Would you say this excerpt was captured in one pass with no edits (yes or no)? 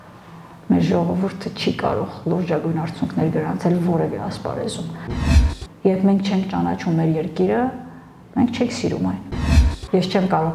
no